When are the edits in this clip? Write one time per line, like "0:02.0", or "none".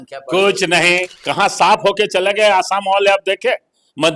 0:01.2